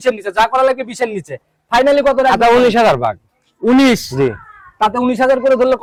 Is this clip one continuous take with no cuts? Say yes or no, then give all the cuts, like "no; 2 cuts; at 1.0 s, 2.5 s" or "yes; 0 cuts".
yes; 0 cuts